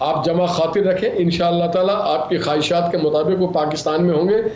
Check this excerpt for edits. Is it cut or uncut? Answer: uncut